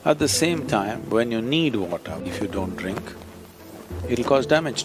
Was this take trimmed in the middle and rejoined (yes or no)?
yes